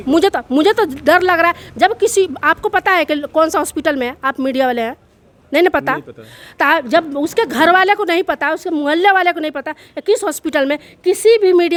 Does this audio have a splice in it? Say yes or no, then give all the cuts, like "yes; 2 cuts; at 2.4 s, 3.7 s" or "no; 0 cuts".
no; 0 cuts